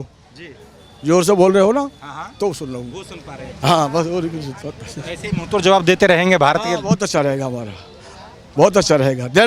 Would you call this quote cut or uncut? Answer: uncut